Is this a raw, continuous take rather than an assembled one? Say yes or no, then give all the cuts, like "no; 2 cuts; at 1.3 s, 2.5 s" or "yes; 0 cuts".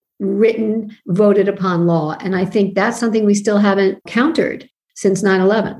no; 1 cut; at 4.0 s